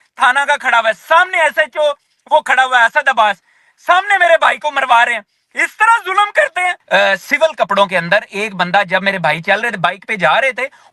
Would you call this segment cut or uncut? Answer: cut